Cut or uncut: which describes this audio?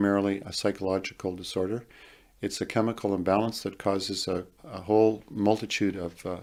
uncut